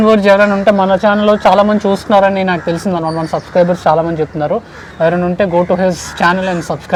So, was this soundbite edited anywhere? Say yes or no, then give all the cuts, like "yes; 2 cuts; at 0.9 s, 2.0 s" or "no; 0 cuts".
no; 0 cuts